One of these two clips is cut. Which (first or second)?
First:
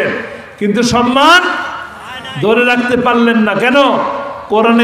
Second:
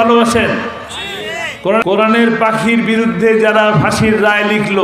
second